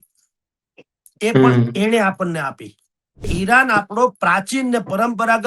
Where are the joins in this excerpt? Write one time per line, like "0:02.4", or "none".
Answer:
0:03.3